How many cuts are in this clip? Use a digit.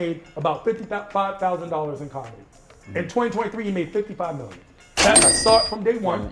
1